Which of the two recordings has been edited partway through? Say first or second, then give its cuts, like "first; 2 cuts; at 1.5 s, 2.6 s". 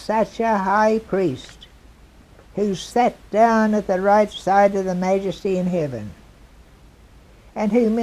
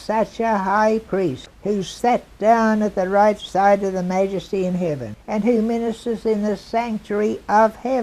second; 2 cuts; at 1.5 s, 5.1 s